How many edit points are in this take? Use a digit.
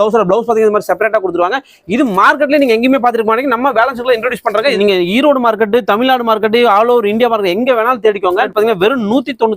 2